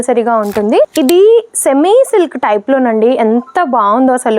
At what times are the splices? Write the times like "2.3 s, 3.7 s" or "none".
0.9 s